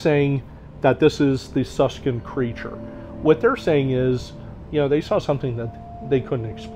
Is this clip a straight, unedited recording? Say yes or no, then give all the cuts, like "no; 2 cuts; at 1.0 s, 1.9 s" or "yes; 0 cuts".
yes; 0 cuts